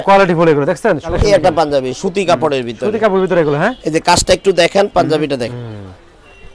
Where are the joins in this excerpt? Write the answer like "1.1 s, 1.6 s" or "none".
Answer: 1.1 s, 5.5 s